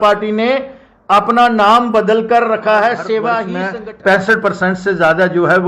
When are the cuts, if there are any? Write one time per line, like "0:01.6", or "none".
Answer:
0:03.6